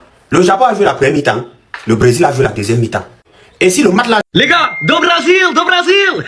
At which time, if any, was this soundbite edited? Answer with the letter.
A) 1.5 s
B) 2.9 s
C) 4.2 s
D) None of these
C